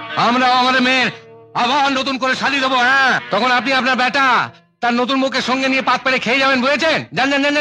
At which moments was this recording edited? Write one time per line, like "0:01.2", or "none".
none